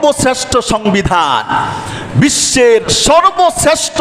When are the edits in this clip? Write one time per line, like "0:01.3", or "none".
none